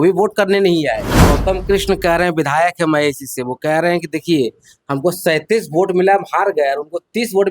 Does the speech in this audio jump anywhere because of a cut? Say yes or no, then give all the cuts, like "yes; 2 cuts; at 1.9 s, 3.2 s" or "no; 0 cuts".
yes; 1 cut; at 1.1 s